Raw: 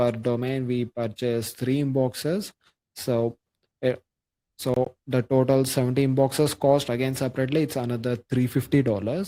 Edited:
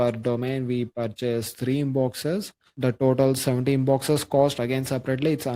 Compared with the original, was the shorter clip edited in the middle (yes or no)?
yes